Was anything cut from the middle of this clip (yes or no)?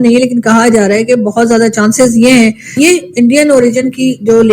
yes